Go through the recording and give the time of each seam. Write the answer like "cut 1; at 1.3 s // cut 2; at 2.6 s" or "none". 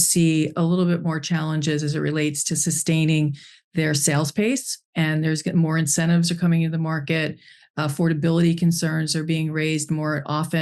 none